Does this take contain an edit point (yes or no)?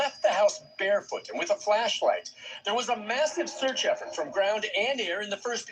no